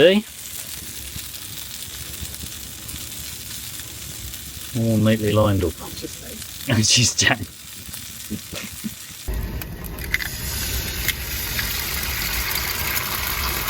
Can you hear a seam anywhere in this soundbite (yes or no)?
no